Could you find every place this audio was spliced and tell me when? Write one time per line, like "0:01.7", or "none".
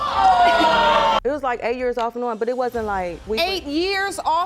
0:01.2